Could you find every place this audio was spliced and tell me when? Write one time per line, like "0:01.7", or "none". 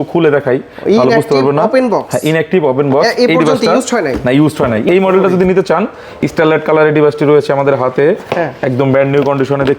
none